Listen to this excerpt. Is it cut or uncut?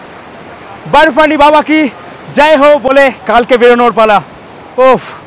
uncut